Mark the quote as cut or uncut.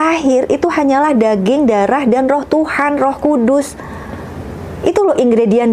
uncut